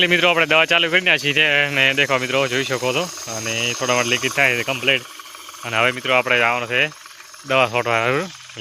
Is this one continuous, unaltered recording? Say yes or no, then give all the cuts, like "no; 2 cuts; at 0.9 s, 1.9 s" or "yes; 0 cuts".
yes; 0 cuts